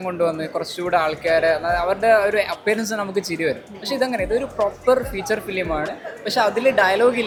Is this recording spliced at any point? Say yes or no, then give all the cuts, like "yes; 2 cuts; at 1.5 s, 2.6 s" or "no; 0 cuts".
no; 0 cuts